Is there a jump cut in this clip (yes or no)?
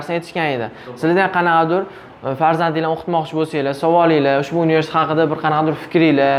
no